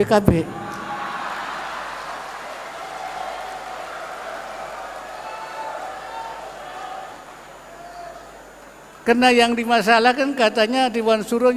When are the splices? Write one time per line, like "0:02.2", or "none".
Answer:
none